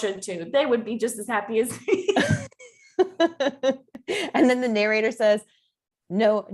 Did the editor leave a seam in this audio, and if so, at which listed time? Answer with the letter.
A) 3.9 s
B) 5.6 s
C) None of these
C